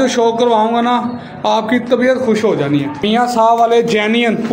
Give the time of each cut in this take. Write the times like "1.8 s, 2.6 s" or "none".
3.1 s